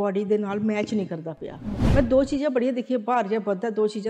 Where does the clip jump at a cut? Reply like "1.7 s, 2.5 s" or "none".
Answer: 1.8 s